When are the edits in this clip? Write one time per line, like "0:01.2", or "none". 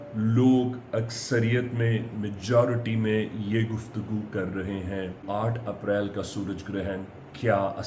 0:05.2